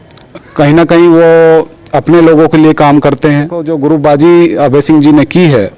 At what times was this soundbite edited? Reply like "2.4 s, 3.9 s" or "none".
3.7 s

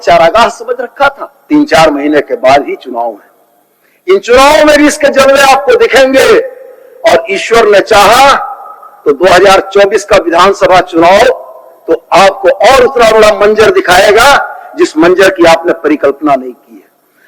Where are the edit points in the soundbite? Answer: 1.3 s

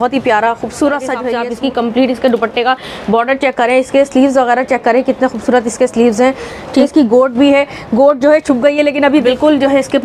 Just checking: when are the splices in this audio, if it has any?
1.3 s, 6.8 s, 9.2 s

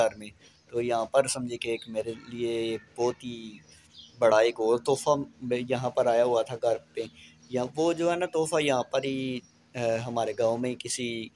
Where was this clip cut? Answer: none

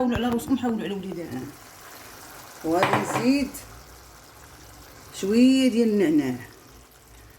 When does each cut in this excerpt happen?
1.2 s

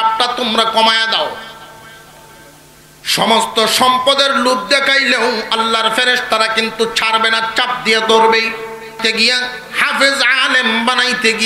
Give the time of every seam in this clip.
9.0 s

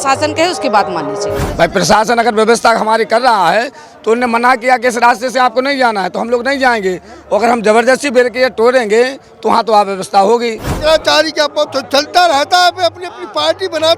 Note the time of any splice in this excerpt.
1.4 s, 10.7 s

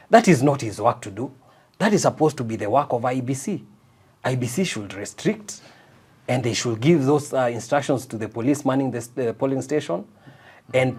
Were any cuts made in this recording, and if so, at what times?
none

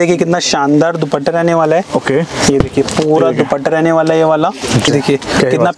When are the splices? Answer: 4.8 s

